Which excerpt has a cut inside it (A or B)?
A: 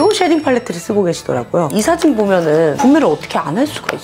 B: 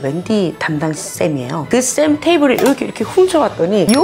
A